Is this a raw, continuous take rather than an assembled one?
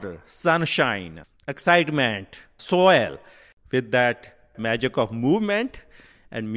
no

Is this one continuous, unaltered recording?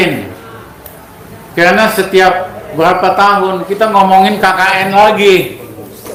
yes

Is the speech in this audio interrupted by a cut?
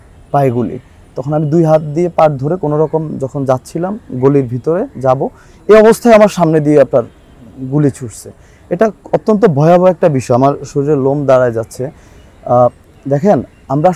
no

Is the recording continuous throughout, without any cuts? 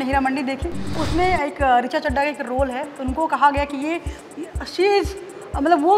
no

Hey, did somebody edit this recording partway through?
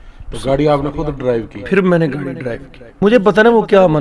yes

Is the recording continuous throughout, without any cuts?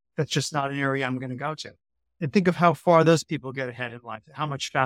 no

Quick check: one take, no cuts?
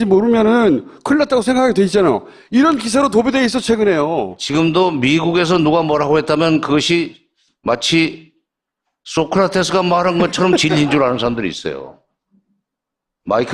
no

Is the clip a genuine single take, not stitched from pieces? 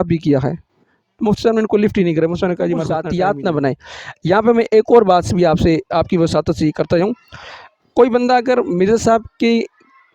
no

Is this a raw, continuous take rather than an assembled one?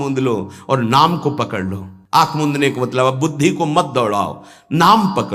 yes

